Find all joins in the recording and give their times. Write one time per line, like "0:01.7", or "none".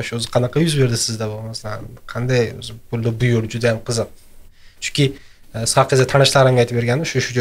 none